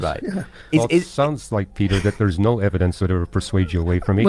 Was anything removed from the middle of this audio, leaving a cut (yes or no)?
no